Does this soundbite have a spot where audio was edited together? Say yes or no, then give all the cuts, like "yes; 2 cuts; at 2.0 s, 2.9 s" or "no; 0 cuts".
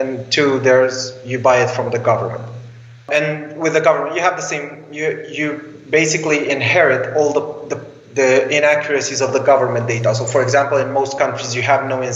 yes; 1 cut; at 3.0 s